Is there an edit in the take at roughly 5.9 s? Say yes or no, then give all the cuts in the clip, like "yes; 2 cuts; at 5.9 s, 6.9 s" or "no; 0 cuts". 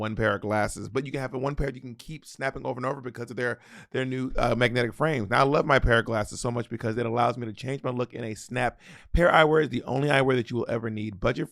no; 1 cut; at 8.9 s